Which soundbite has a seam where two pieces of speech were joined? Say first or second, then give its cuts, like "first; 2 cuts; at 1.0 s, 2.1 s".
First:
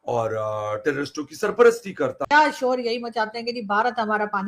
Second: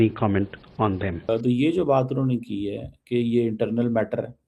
first; 1 cut; at 2.2 s